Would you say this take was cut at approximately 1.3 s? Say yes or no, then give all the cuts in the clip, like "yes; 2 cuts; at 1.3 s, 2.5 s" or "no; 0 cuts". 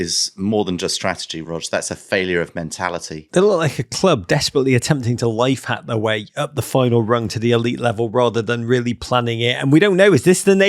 yes; 2 cuts; at 1.3 s, 3.2 s